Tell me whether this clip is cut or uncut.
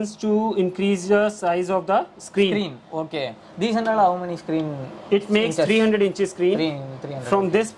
uncut